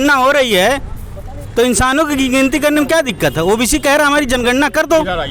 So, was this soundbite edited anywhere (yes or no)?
no